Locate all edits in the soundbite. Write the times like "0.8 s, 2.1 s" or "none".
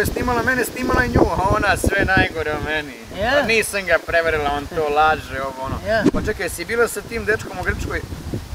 none